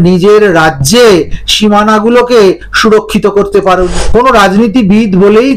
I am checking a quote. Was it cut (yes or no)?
yes